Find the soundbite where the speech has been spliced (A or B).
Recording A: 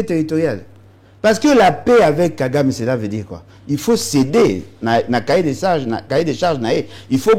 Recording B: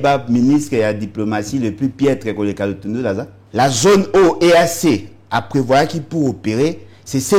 B